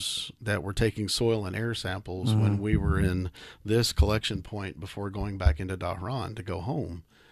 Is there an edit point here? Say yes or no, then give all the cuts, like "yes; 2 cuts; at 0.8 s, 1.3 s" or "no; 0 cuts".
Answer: no; 0 cuts